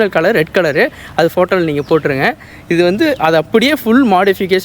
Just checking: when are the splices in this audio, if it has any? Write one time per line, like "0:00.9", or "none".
none